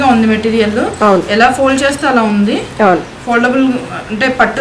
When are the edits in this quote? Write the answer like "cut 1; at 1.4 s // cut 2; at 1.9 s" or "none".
none